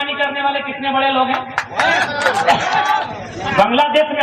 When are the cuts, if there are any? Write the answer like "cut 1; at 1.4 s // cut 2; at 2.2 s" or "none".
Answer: cut 1; at 3.0 s